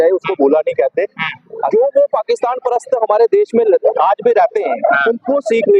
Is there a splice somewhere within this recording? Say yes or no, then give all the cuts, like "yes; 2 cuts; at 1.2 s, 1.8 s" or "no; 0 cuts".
yes; 1 cut; at 1.6 s